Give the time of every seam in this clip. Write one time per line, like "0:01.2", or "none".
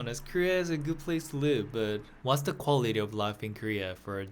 0:02.1